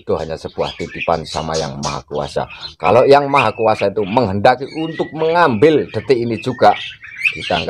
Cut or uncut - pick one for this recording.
uncut